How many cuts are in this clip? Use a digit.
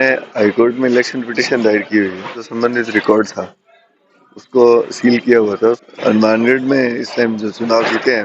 2